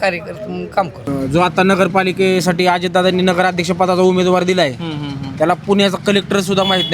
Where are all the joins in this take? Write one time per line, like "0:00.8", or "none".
0:01.1